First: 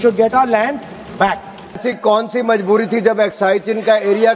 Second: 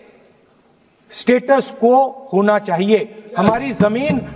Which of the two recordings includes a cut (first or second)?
first